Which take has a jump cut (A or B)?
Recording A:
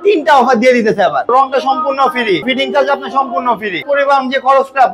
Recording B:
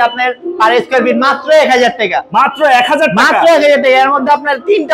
A